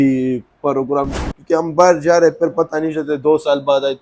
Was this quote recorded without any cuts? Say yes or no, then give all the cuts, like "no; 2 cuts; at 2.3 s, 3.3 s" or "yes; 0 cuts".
no; 1 cut; at 1.3 s